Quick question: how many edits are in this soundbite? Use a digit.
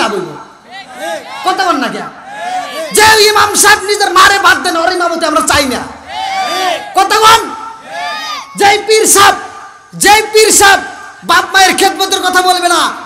0